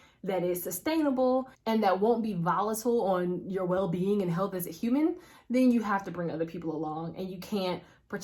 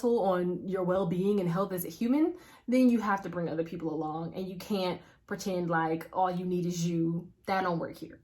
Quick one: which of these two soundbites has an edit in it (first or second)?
second